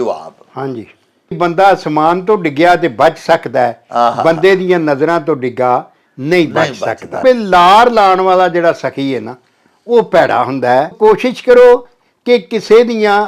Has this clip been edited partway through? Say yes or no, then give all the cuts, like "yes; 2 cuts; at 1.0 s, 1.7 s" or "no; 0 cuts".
yes; 3 cuts; at 1.4 s, 7.2 s, 10.9 s